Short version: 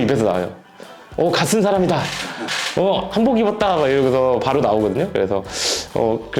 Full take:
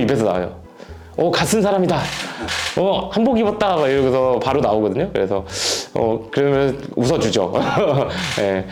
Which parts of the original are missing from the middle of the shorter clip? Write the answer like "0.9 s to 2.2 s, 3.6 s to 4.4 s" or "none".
none